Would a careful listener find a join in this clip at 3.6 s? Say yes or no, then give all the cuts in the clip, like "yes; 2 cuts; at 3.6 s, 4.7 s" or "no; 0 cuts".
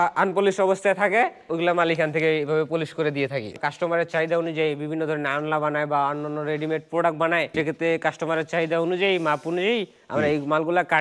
yes; 3 cuts; at 1.5 s, 3.6 s, 7.5 s